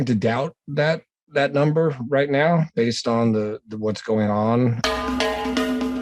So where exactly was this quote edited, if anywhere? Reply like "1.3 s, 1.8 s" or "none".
4.8 s